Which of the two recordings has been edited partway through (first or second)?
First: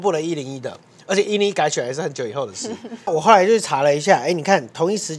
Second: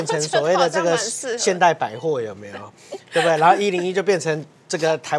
first